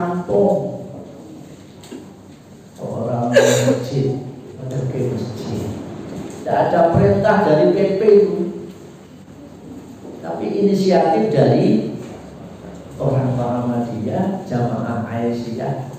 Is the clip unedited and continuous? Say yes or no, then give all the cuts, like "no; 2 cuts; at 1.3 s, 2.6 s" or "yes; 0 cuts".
no; 3 cuts; at 4.7 s, 6.4 s, 9.2 s